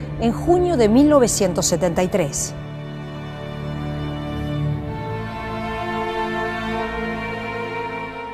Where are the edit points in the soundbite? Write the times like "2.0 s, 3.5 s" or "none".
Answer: 5.0 s